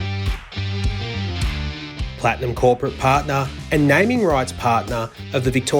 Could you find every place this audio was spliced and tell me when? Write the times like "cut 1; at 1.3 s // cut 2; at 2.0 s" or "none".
cut 1; at 2.1 s